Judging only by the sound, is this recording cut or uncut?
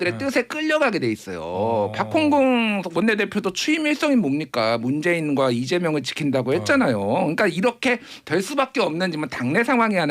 uncut